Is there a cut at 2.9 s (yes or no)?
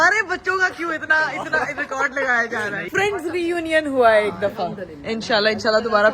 yes